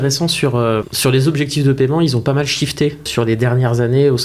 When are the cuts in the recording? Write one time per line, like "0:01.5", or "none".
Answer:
0:00.9
0:03.1

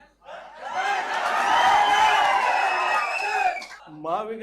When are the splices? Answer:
none

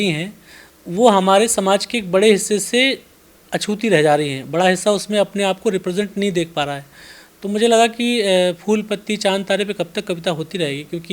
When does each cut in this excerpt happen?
none

